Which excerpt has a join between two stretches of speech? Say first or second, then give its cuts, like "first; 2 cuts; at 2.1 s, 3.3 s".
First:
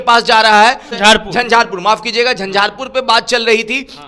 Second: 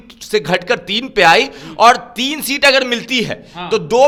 first; 1 cut; at 0.9 s